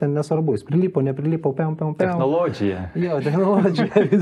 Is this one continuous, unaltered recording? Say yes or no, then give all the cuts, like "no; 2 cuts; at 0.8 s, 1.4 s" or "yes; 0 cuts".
yes; 0 cuts